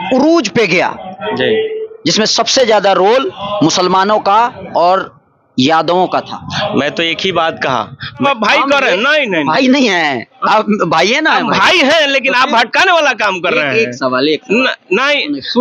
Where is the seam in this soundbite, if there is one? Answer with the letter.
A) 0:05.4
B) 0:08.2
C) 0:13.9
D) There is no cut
B